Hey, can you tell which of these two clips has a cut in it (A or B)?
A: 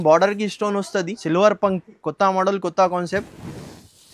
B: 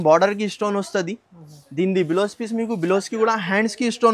A